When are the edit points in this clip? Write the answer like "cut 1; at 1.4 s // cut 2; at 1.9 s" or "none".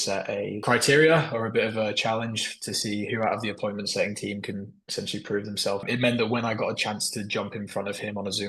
cut 1; at 5.8 s